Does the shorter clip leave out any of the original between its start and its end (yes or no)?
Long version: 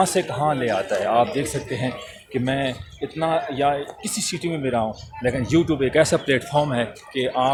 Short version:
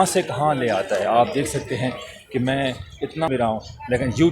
yes